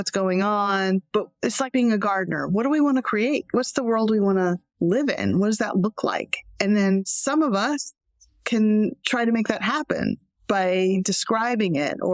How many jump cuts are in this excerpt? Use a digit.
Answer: 0